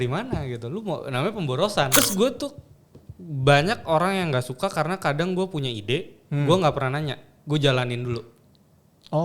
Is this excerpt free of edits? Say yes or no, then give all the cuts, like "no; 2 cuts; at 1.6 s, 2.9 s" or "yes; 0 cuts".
no; 1 cut; at 2.0 s